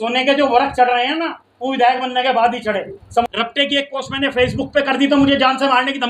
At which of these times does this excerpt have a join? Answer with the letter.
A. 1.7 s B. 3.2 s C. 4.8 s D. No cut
B